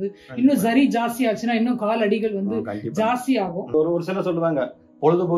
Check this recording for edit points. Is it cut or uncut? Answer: cut